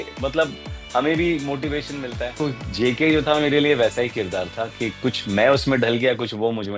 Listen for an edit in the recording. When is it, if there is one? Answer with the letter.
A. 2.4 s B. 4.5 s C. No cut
A